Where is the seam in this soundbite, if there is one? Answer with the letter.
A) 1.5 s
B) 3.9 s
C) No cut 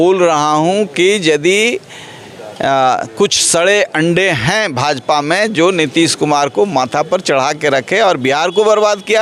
C